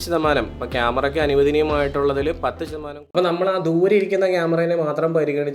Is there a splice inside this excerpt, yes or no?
yes